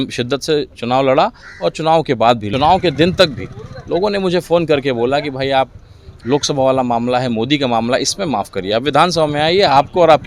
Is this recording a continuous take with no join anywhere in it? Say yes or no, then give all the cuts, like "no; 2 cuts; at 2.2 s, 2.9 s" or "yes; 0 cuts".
no; 1 cut; at 2.5 s